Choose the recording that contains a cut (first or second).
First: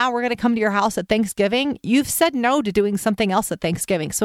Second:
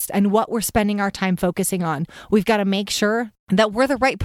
second